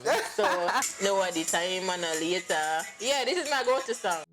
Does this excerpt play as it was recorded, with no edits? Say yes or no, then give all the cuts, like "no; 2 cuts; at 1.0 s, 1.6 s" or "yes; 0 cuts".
no; 1 cut; at 1.0 s